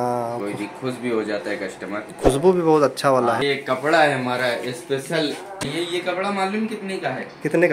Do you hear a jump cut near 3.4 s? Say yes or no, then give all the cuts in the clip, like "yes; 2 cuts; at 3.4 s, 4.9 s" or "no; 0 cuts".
yes; 2 cuts; at 3.4 s, 5.7 s